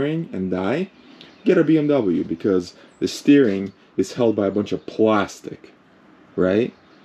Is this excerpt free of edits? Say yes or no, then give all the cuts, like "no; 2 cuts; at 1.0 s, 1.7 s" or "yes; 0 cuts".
yes; 0 cuts